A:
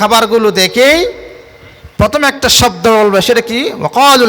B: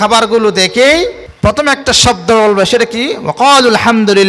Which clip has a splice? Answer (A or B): B